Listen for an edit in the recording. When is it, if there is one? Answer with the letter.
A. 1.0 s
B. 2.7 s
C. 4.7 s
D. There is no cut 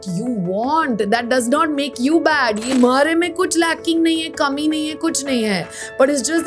B